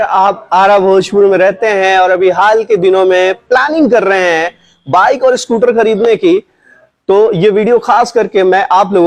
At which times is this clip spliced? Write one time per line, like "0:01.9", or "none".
none